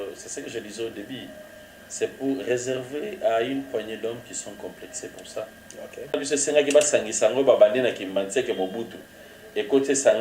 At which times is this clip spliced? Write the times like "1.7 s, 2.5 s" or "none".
6.2 s

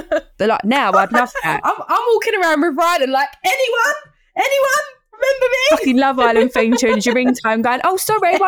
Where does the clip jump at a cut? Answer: 1.7 s

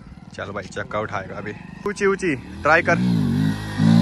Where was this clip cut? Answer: 1.8 s

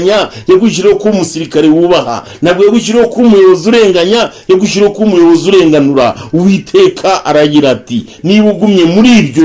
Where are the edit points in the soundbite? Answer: none

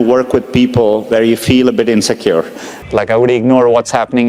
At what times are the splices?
2.7 s

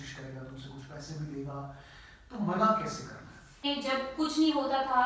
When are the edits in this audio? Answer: 3.6 s

